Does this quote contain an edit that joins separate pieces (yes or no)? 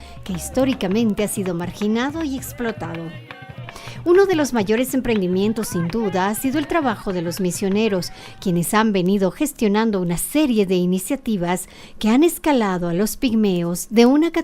yes